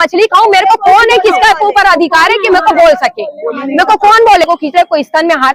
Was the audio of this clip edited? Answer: yes; 1 cut; at 4.5 s

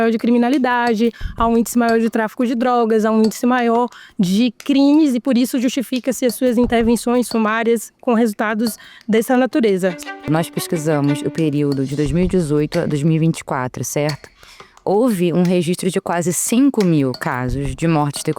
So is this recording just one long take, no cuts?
no; 1 cut; at 10.1 s

